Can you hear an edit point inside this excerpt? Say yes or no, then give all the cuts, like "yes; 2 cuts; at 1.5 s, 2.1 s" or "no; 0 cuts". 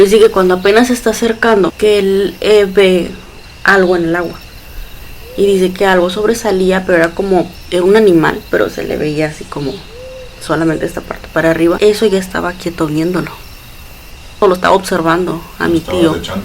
yes; 3 cuts; at 1.7 s, 11.8 s, 14.4 s